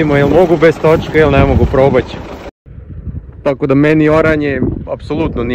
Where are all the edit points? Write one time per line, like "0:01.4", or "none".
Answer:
0:02.6